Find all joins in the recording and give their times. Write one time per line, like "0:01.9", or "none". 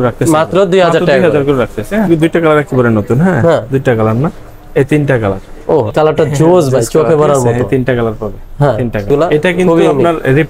0:02.1
0:05.9
0:09.1